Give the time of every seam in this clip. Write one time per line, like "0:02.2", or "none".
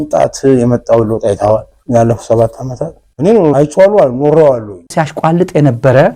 0:03.4
0:04.9